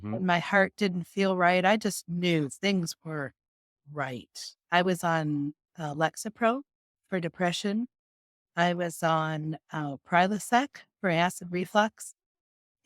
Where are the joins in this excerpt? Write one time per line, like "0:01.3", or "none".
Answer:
none